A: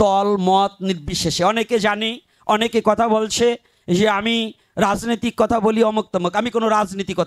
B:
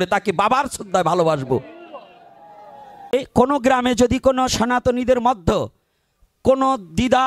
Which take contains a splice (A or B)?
B